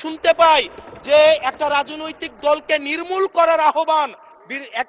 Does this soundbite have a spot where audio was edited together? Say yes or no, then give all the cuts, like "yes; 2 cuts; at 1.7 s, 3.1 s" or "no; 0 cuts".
no; 0 cuts